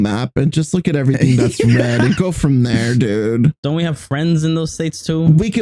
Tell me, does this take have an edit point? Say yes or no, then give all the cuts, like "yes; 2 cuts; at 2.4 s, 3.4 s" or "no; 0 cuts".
yes; 1 cut; at 3.5 s